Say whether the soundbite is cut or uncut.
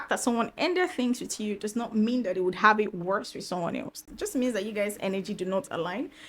cut